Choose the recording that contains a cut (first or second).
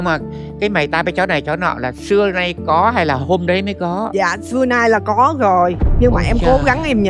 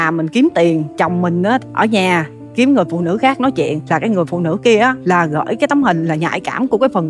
second